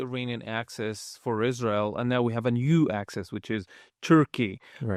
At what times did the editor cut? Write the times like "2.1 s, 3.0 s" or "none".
none